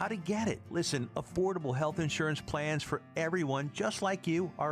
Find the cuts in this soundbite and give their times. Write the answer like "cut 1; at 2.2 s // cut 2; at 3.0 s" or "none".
none